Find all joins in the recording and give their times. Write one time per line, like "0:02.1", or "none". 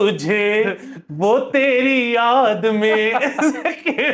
none